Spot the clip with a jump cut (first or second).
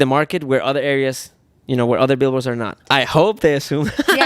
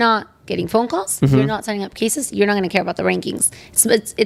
first